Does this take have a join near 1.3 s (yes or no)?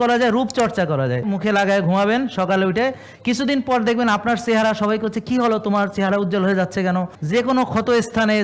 yes